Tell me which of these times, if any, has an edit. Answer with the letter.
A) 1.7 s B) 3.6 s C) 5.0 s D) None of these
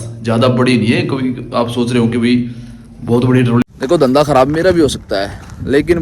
B